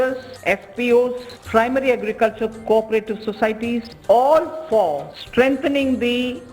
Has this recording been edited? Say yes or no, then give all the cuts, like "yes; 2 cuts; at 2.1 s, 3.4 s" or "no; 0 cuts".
yes; 1 cut; at 3.9 s